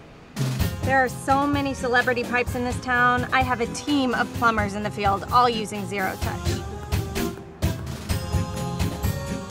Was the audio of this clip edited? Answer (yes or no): no